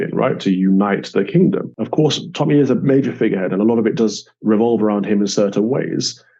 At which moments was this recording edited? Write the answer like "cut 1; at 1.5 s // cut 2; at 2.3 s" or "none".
cut 1; at 1.8 s